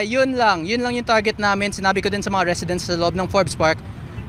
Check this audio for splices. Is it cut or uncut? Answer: uncut